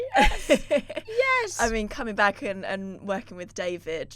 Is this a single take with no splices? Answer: yes; 0 cuts

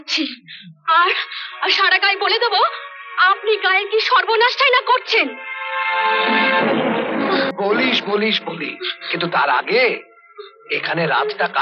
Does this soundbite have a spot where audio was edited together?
yes; 1 cut; at 7.5 s

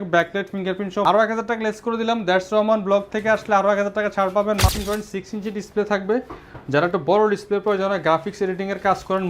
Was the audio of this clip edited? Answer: yes; 2 cuts; at 1.0 s, 4.6 s

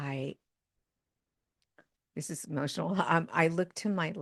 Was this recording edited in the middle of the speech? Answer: no; 0 cuts

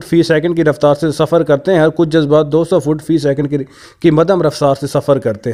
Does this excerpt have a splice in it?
no; 0 cuts

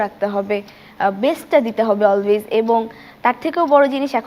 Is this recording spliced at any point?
no; 0 cuts

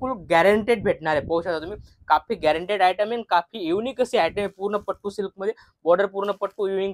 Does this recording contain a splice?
no; 0 cuts

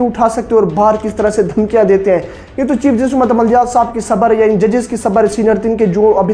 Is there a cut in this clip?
no; 0 cuts

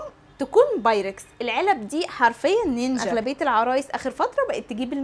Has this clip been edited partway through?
yes; 1 cut; at 3.1 s

